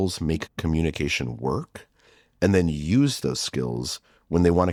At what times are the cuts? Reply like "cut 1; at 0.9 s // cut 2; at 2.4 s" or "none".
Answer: none